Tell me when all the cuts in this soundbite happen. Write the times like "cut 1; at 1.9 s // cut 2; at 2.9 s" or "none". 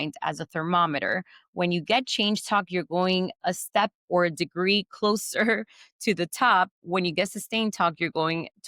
none